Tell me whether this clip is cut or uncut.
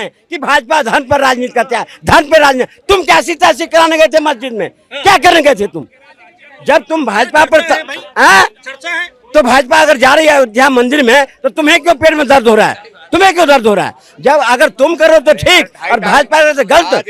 uncut